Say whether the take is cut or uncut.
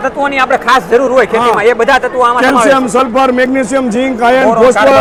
uncut